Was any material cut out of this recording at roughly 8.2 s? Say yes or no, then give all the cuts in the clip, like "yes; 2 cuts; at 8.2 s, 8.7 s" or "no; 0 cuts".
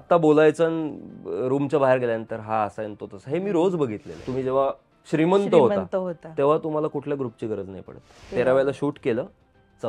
yes; 2 cuts; at 4.2 s, 8.2 s